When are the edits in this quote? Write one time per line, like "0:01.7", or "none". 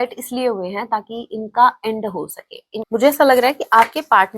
0:02.8